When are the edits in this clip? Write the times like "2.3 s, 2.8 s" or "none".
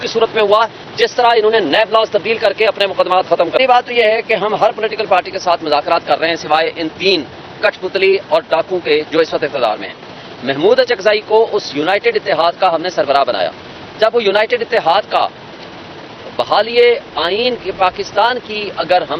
3.6 s